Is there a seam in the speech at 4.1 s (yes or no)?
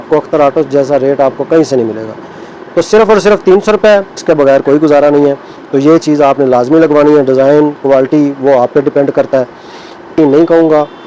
yes